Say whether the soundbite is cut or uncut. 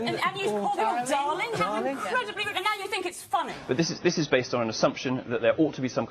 cut